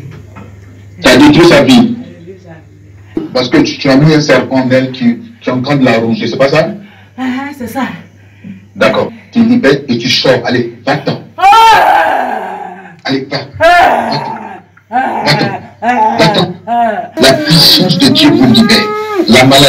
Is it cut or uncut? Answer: cut